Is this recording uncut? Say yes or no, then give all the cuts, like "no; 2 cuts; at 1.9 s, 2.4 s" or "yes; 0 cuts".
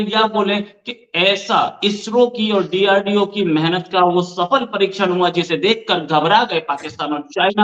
yes; 0 cuts